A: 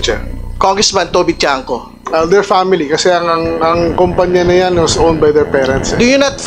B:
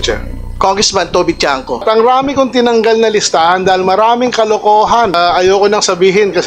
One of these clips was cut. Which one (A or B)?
B